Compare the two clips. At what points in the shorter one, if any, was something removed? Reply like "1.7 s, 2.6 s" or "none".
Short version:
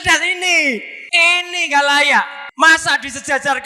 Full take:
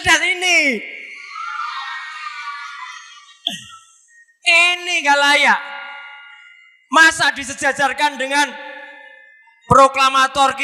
1.0 s, 2.4 s